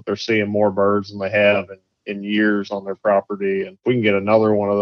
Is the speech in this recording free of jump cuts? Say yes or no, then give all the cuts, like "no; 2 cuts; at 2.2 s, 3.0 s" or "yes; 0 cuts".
no; 1 cut; at 3.8 s